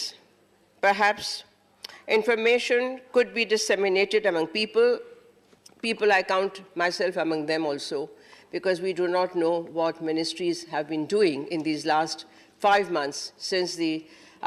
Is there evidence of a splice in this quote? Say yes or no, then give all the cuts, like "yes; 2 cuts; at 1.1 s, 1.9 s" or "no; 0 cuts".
no; 0 cuts